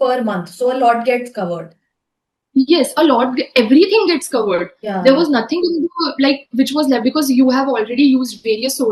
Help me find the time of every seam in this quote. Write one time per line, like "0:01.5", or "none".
none